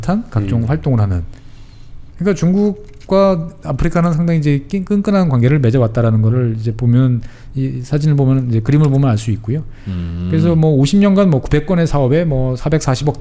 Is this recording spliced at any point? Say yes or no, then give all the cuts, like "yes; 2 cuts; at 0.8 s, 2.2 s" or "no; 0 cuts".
no; 0 cuts